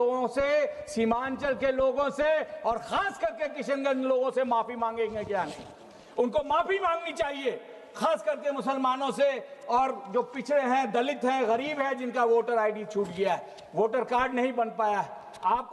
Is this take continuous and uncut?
yes; 0 cuts

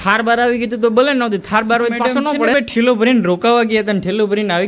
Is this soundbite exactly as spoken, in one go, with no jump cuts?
no; 1 cut; at 2.5 s

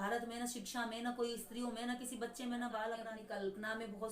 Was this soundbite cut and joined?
yes; 1 cut; at 3.1 s

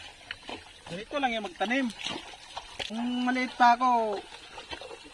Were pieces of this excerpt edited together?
yes; 1 cut; at 2.8 s

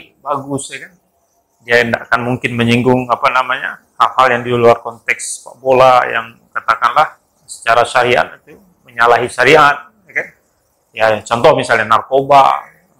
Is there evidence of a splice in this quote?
no; 0 cuts

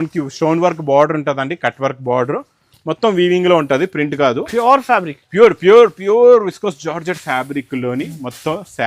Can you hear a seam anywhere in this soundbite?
no; 0 cuts

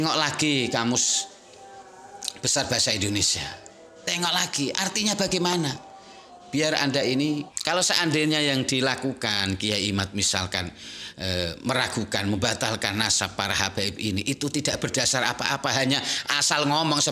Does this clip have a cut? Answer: yes; 1 cut; at 7.5 s

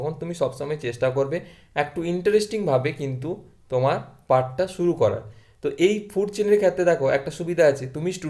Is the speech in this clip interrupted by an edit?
no; 0 cuts

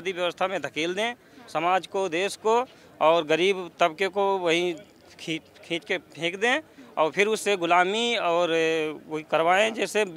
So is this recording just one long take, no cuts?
yes; 0 cuts

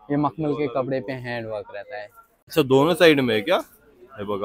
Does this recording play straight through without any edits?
no; 1 cut; at 2.5 s

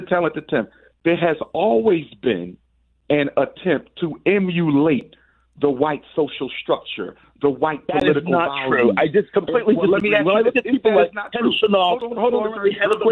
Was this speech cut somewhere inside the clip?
no; 0 cuts

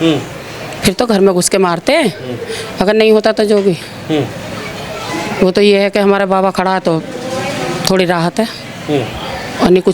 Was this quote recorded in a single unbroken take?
yes; 0 cuts

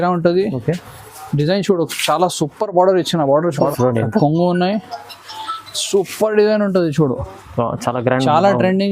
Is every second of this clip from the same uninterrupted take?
no; 1 cut; at 3.5 s

